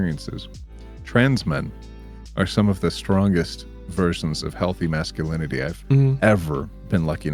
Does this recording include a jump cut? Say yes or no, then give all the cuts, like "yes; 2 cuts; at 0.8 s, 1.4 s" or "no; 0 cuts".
no; 0 cuts